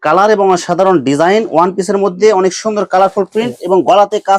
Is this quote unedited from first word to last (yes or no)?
yes